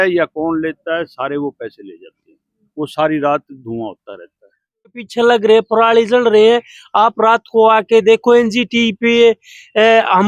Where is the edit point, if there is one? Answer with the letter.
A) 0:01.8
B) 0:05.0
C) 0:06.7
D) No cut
B